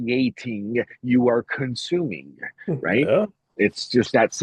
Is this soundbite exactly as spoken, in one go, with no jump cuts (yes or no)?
yes